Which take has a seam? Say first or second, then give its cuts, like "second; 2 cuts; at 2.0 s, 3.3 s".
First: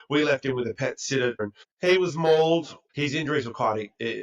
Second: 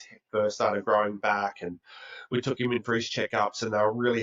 first; 2 cuts; at 1.5 s, 2.8 s